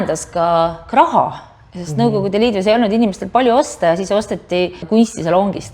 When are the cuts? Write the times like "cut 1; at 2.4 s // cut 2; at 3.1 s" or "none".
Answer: cut 1; at 4.8 s